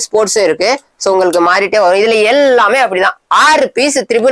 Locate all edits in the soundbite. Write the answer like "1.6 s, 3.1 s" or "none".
none